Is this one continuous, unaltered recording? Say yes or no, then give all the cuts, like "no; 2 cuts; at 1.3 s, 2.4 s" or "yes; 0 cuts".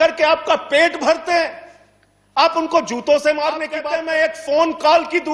no; 1 cut; at 3.8 s